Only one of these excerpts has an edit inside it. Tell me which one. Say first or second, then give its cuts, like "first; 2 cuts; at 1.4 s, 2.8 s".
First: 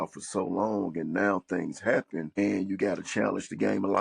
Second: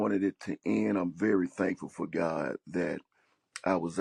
first; 1 cut; at 2.4 s